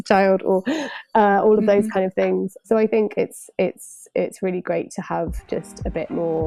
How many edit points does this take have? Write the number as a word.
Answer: zero